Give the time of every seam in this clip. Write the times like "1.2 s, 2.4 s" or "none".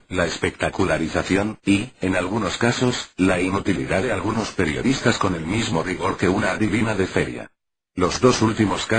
2.1 s

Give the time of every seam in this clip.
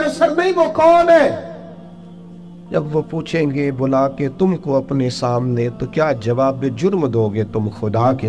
none

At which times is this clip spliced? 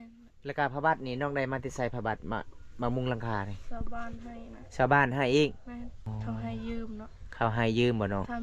6.0 s

